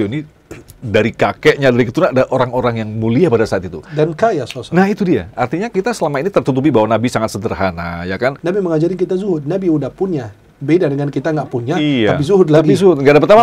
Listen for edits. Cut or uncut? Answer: cut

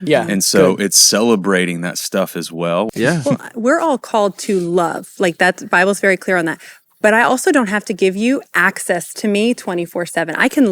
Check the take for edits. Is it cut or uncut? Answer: cut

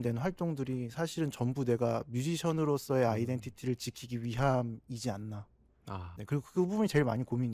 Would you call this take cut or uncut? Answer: uncut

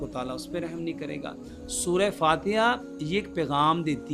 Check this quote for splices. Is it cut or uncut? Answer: uncut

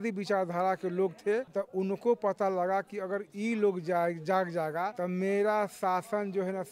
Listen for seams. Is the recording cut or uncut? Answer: cut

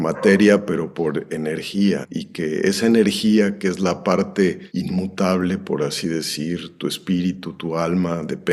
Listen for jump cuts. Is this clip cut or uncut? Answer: uncut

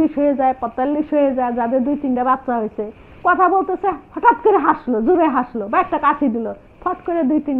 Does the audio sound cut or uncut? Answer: uncut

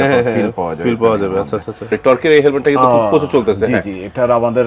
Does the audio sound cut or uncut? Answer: cut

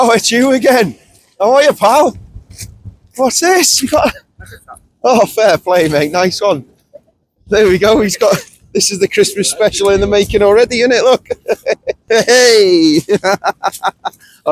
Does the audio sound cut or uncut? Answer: cut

